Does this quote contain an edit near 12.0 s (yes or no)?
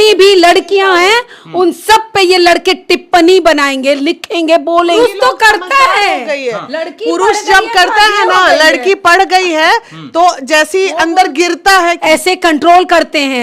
yes